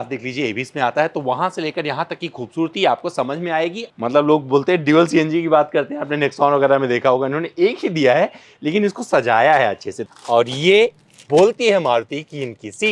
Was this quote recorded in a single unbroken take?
no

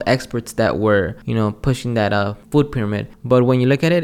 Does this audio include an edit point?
yes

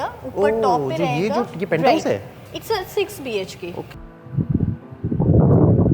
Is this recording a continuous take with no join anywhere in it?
no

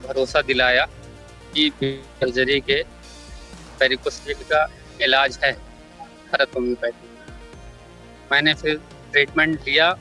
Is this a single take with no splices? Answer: yes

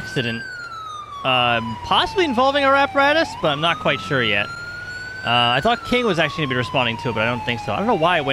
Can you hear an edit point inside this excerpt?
no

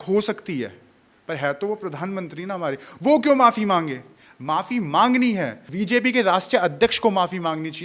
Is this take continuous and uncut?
no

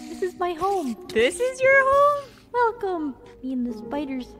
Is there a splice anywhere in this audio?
no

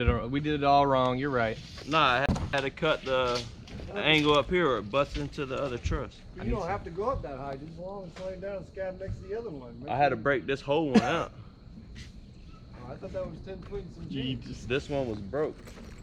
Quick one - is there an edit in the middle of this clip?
no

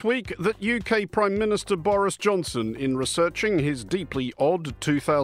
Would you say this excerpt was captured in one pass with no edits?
yes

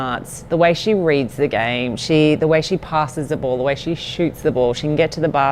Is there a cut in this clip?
no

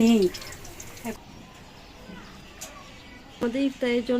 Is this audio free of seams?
no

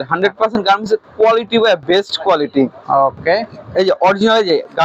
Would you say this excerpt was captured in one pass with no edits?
yes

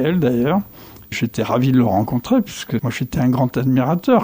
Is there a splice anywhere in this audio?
yes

